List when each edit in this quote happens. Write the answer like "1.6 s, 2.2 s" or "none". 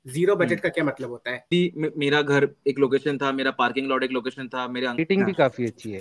1.5 s, 5.0 s

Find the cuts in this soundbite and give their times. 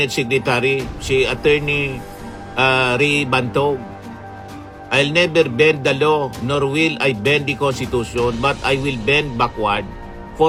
none

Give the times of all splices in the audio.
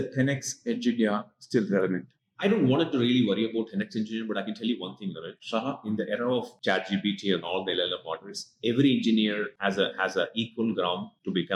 none

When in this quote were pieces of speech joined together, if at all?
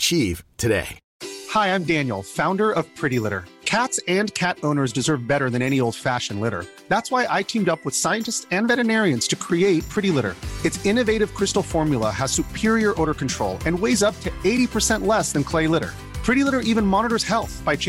1.0 s

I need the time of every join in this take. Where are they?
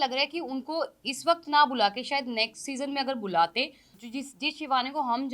3.9 s

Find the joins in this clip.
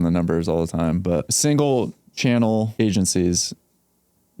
1.3 s, 2.7 s

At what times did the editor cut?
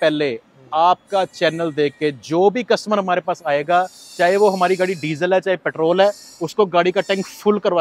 none

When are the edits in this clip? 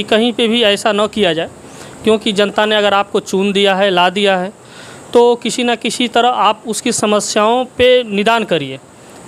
none

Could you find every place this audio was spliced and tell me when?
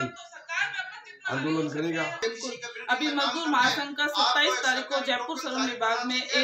2.2 s

